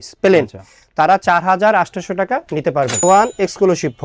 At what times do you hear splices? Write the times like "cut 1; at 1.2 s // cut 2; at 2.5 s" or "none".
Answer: cut 1; at 3.0 s